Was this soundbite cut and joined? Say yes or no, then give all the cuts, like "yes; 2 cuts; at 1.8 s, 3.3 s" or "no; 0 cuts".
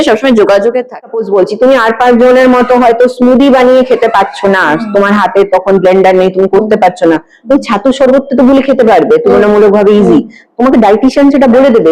yes; 1 cut; at 1.2 s